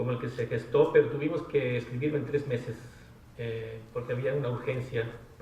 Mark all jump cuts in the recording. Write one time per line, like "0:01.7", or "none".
0:03.7